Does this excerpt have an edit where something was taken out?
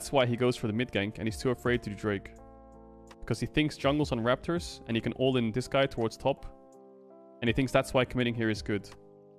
no; 0 cuts

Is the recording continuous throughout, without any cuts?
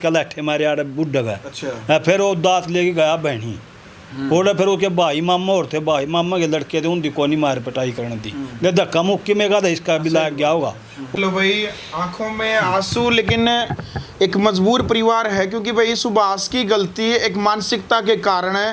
no; 1 cut; at 11.1 s

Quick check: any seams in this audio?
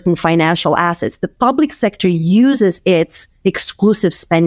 no; 0 cuts

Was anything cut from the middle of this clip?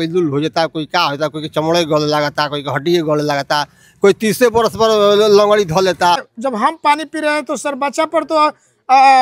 yes; 1 cut; at 6.3 s

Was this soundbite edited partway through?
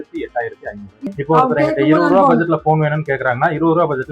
yes; 1 cut; at 1.1 s

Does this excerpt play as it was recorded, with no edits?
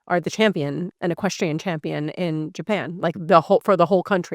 no; 1 cut; at 0.9 s

